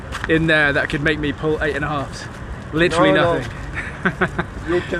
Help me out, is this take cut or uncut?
uncut